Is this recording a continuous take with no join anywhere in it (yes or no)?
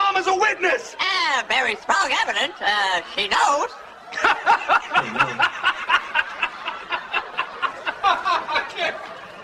yes